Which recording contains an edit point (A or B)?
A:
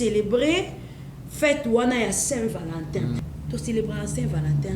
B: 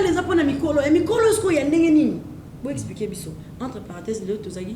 A